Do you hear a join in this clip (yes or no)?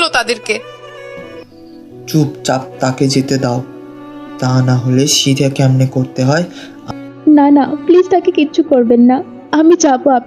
yes